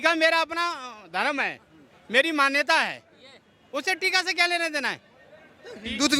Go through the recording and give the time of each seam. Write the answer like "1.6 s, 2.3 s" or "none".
none